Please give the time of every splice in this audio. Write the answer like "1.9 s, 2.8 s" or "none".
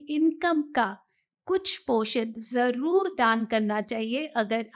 none

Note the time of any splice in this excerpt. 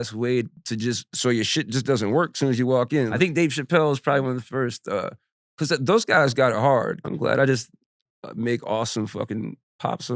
3.1 s, 7.0 s

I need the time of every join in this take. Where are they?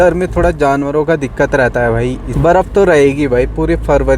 2.3 s

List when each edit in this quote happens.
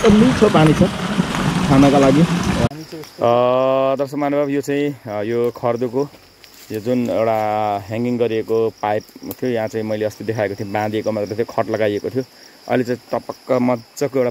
2.7 s

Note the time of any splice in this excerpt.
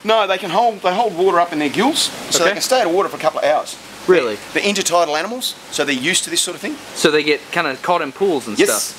3.2 s

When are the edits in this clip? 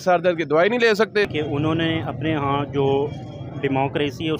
1.3 s

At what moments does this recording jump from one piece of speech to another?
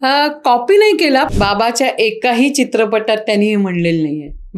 1.3 s

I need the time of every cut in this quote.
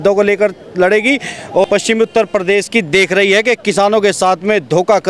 1.6 s

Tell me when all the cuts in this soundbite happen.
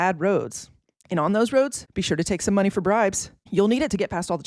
none

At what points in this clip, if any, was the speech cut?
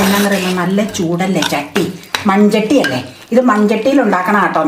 none

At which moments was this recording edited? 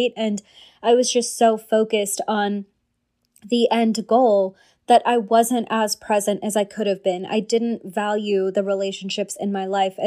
none

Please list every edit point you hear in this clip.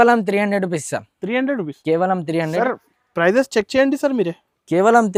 none

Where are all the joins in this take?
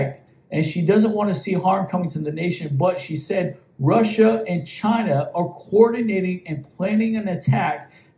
none

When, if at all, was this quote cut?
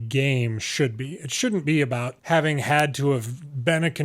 2.1 s

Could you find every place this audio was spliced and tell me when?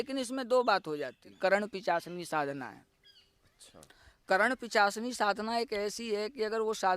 1.3 s

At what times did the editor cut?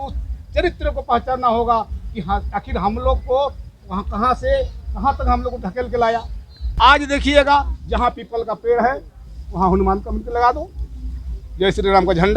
6.6 s

